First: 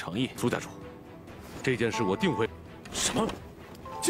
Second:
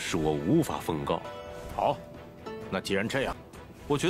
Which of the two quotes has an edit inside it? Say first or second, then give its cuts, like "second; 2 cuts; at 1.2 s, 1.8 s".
second; 1 cut; at 1.2 s